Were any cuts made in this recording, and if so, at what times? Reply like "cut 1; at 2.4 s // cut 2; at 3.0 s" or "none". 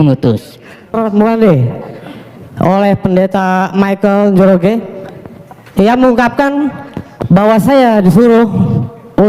cut 1; at 0.9 s

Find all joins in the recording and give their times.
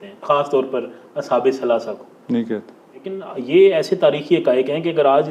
cut 1; at 3.2 s

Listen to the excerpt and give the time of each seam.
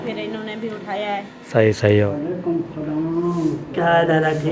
cut 1; at 2.1 s

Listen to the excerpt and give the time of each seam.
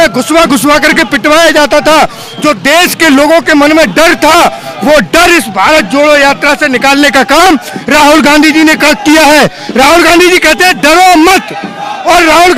none

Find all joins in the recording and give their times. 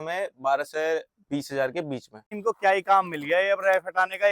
cut 1; at 2.3 s

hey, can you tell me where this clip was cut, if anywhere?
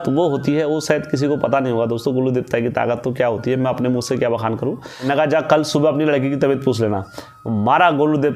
cut 1; at 4.9 s

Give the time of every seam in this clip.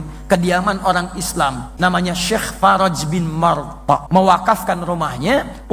cut 1; at 1.6 s // cut 2; at 4.0 s

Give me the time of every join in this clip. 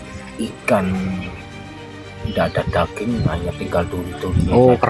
none

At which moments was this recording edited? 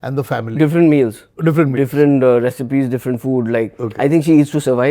cut 1; at 1.2 s

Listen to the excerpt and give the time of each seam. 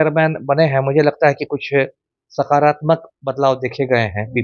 none

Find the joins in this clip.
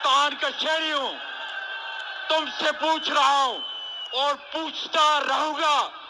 none

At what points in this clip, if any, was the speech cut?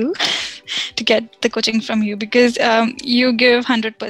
none

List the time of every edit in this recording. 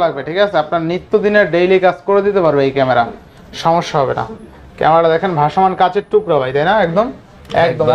none

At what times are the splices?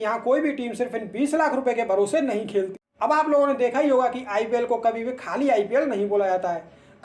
cut 1; at 2.7 s

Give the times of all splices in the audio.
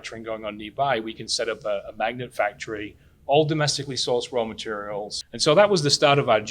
cut 1; at 5.3 s

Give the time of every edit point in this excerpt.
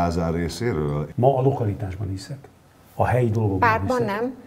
cut 1; at 1.1 s

